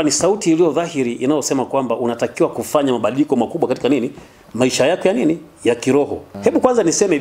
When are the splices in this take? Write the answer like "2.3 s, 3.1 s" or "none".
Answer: 6.2 s